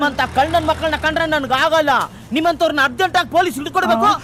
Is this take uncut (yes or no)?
yes